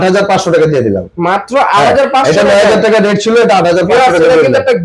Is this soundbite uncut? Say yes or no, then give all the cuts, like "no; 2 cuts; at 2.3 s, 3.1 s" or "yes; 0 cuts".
yes; 0 cuts